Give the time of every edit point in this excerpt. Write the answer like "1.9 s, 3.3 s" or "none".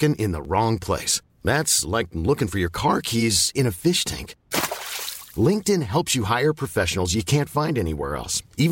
none